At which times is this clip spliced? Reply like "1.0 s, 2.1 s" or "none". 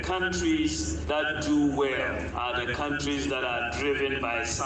1.0 s, 2.3 s